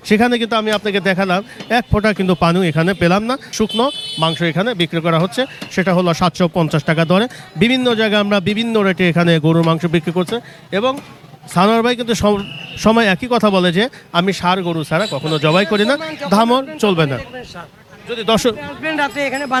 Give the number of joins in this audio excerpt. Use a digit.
0